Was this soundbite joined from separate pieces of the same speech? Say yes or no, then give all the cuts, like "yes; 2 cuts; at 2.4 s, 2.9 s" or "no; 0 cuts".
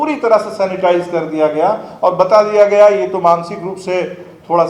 no; 0 cuts